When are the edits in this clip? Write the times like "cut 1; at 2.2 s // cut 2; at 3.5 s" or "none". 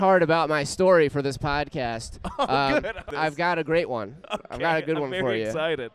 cut 1; at 3.1 s